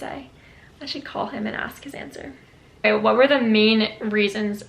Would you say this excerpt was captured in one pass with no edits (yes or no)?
no